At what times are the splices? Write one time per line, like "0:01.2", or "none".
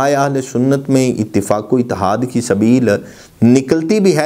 none